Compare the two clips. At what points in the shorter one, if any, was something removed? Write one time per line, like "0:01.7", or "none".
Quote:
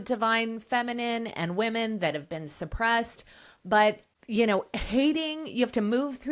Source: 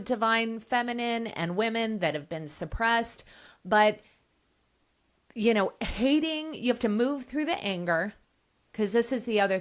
0:04.1